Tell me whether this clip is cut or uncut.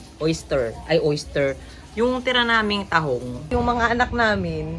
cut